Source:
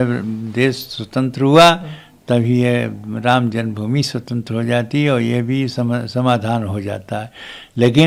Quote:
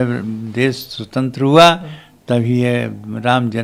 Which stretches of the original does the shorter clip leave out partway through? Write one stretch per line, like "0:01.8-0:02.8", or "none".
none